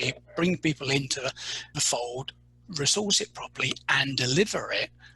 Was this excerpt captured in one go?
no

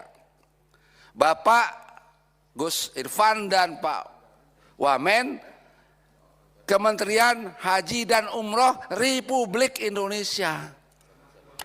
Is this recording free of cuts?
yes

